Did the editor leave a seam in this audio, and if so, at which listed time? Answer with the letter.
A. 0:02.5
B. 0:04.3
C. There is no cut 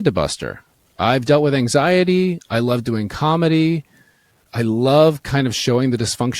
B